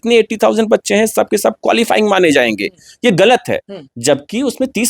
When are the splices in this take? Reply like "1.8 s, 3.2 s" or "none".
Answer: none

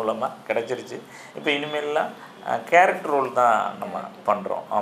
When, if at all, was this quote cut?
none

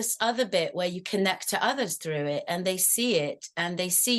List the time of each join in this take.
none

